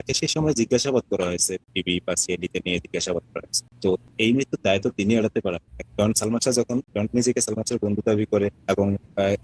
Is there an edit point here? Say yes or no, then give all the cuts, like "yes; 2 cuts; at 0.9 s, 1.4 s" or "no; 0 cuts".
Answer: yes; 1 cut; at 5.8 s